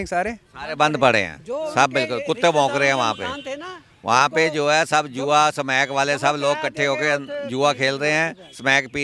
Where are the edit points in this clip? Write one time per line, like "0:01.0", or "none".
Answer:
none